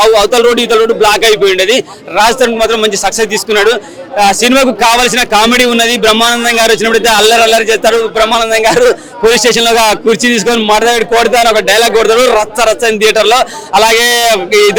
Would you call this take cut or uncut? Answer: uncut